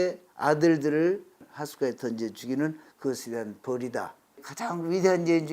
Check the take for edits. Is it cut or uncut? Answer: cut